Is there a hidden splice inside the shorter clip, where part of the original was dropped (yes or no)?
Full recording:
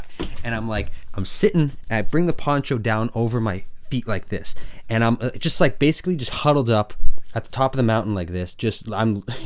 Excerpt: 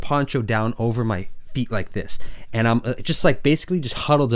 no